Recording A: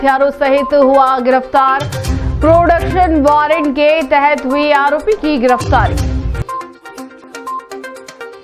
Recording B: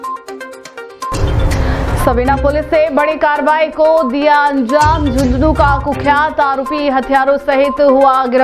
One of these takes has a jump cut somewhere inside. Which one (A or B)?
B